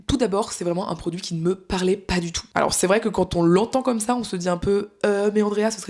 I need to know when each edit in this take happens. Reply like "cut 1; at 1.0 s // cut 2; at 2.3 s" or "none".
cut 1; at 2.4 s